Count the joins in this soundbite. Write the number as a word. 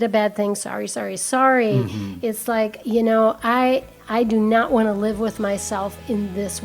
zero